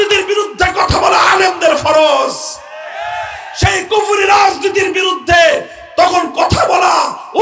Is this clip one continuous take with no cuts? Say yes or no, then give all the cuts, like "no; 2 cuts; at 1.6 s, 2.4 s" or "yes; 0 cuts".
yes; 0 cuts